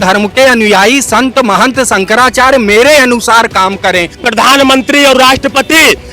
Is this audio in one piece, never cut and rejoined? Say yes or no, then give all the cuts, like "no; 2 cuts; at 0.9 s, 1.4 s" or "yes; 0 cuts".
no; 1 cut; at 4.2 s